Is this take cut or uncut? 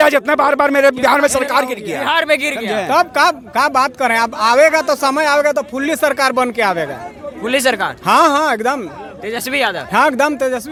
uncut